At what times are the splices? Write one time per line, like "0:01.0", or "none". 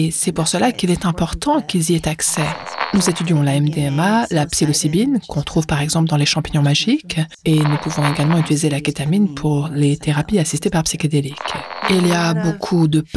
0:02.8
0:07.3
0:11.8